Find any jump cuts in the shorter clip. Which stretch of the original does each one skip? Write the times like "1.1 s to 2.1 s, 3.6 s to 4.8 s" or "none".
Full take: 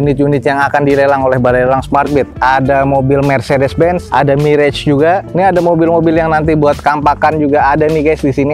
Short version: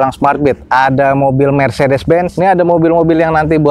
4.0 s to 5.3 s